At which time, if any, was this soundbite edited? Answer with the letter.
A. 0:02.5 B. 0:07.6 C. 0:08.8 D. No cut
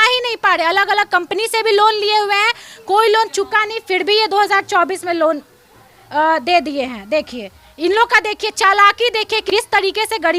D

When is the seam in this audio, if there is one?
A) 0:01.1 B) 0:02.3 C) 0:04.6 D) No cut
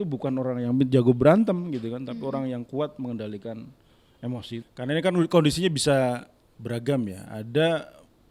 C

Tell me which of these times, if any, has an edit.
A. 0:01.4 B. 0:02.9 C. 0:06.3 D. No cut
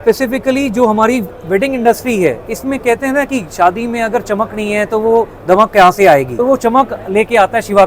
C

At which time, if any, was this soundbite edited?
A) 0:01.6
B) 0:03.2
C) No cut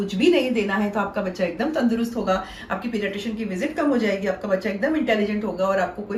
C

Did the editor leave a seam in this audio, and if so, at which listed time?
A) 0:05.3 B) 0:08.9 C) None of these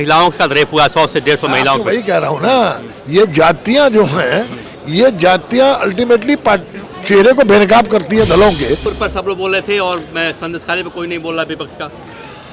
B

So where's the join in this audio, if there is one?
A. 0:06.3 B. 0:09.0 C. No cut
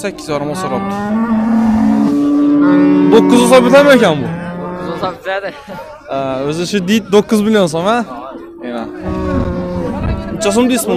B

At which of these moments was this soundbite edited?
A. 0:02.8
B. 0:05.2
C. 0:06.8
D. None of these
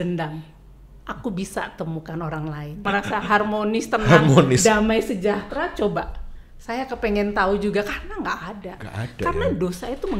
A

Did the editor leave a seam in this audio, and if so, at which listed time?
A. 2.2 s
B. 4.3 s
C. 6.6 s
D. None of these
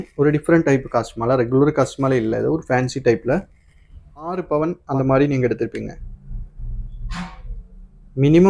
B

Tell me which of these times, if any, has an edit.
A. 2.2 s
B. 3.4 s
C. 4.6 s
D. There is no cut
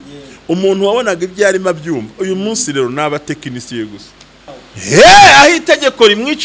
C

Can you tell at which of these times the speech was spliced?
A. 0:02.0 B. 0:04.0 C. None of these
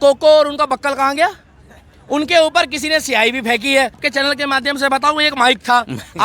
B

